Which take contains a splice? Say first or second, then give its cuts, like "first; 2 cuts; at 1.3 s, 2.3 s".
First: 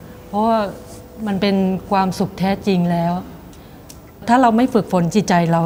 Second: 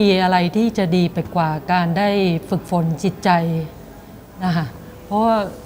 first; 1 cut; at 4.2 s